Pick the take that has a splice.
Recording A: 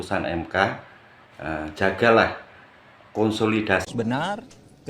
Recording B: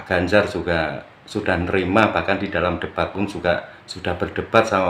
A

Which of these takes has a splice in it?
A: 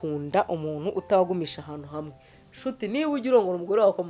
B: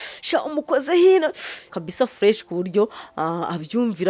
B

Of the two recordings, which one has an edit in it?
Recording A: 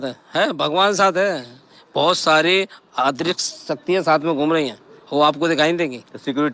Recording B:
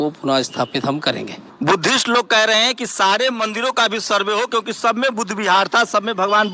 B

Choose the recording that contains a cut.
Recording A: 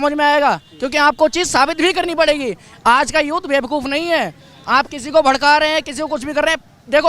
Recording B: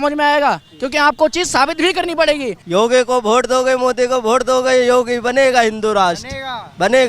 B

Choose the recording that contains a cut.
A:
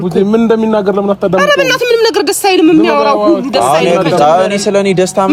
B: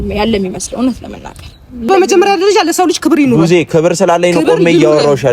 B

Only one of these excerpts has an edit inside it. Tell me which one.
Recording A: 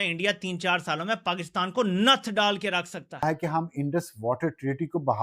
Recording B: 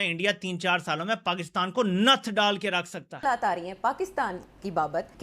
A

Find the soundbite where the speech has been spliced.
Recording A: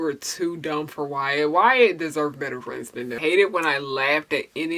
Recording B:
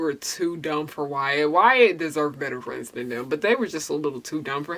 A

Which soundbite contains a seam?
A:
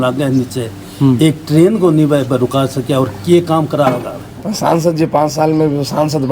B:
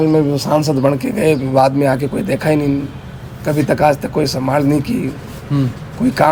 A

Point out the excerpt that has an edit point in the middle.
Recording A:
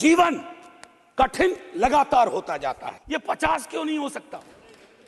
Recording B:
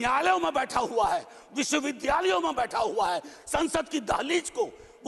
A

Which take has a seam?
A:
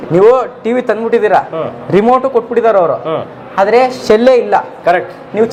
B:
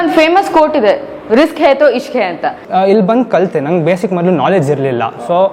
B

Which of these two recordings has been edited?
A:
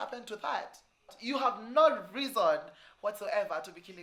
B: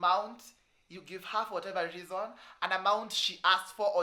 A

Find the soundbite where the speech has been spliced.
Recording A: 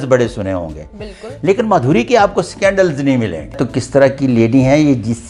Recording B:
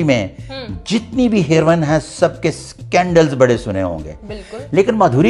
A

